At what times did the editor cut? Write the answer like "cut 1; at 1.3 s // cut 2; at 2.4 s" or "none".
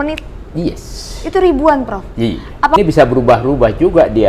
cut 1; at 2.8 s